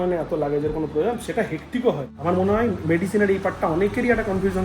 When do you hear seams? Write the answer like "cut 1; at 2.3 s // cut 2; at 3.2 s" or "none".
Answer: cut 1; at 2.1 s